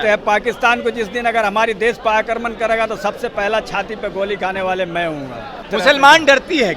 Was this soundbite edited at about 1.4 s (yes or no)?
no